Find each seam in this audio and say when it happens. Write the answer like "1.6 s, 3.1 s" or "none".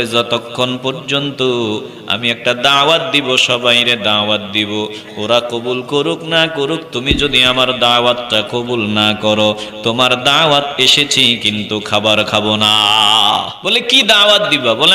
13.6 s

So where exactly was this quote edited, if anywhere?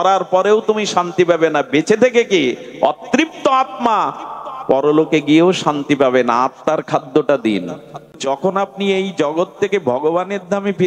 8.2 s

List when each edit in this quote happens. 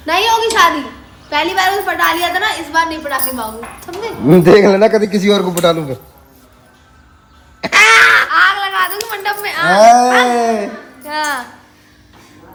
none

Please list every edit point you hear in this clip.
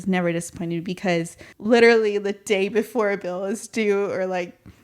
1.4 s

